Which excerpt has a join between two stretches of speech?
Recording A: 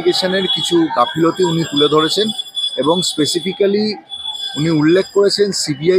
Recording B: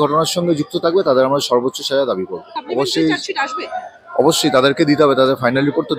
B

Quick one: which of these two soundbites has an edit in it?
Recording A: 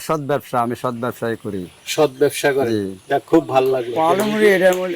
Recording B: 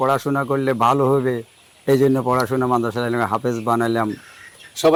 A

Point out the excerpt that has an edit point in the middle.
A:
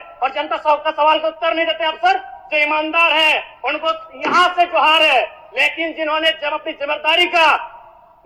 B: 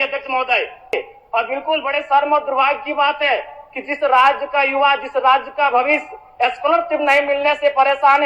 B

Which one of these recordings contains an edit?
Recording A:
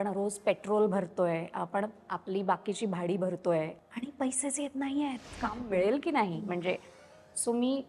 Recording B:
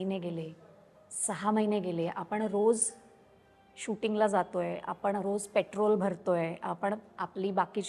A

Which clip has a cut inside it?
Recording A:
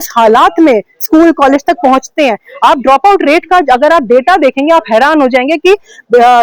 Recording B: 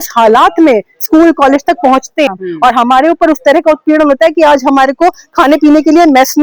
B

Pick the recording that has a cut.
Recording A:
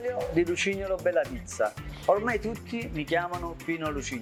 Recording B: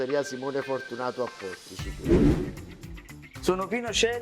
B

